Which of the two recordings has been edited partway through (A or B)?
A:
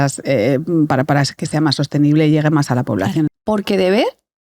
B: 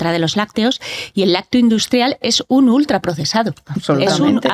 A